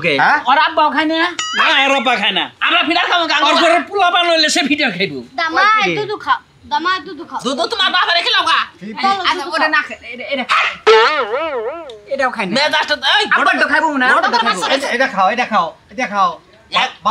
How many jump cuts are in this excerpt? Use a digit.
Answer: 0